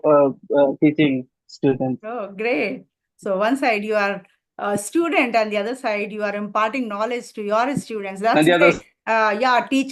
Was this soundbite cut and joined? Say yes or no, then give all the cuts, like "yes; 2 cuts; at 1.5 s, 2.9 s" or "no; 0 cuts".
no; 0 cuts